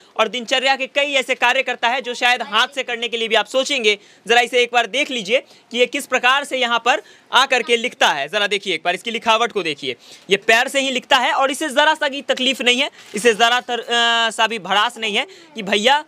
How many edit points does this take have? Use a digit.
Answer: 0